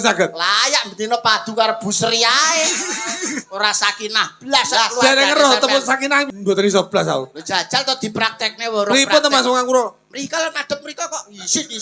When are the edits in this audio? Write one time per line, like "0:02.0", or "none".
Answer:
0:06.3